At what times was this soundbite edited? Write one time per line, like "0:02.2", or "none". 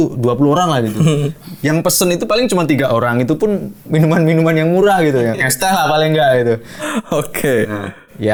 none